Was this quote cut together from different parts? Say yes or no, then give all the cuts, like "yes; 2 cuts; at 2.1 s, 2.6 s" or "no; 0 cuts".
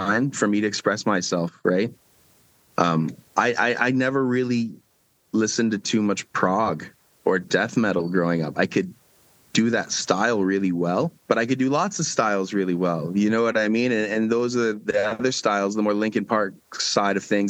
yes; 1 cut; at 11.2 s